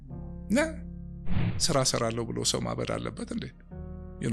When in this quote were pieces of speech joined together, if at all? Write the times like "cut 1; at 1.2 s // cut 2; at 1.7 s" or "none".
cut 1; at 1.0 s